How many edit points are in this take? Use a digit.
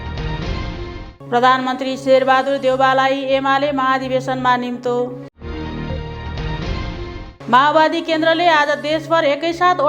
1